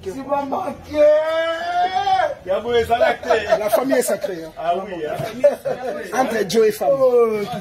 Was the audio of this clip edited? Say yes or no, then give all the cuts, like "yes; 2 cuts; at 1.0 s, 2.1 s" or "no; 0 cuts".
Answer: no; 0 cuts